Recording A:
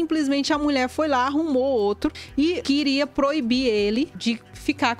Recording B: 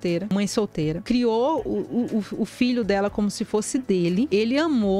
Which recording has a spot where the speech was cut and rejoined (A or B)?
B